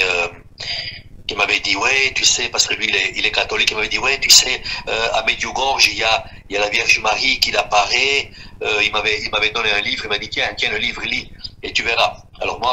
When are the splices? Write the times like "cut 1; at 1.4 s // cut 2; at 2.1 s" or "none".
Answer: none